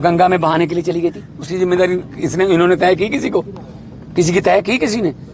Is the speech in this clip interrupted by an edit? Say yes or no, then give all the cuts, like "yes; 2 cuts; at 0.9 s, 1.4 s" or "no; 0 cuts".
yes; 1 cut; at 3.2 s